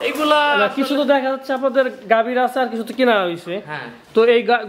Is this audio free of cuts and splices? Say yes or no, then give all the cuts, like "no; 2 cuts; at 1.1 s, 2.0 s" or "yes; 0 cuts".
yes; 0 cuts